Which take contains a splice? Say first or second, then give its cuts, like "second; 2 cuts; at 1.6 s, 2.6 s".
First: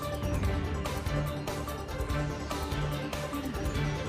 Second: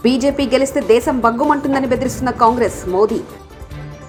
first; 2 cuts; at 1.7 s, 2.9 s